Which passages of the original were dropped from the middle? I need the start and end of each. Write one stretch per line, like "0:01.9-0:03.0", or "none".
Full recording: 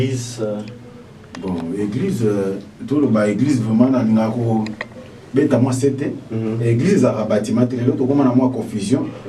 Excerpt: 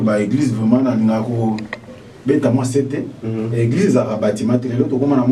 none